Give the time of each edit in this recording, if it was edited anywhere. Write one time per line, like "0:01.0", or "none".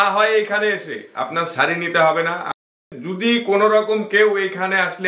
0:02.6